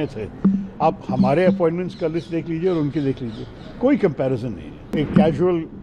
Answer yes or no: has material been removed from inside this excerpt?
yes